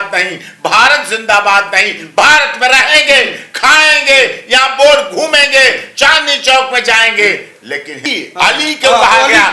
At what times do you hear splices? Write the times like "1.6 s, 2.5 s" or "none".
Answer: 8.1 s